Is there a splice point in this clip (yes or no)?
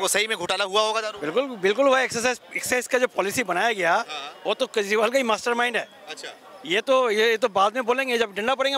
no